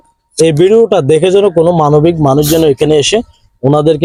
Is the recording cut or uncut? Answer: uncut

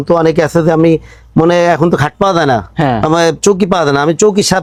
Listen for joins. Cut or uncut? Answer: uncut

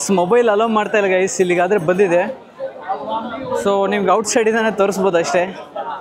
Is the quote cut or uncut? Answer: uncut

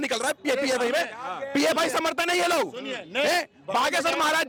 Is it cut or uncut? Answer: uncut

